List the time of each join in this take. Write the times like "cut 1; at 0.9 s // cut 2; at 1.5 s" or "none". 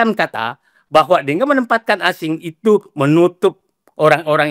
none